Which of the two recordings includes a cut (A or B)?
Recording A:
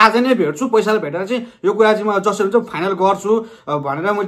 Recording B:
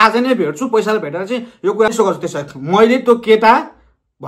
B